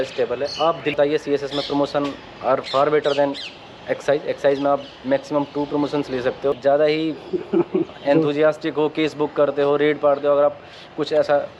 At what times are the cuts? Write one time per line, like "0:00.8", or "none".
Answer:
0:01.0
0:06.6